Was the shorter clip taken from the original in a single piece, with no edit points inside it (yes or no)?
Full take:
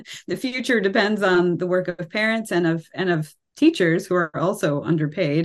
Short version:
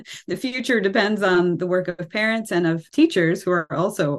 no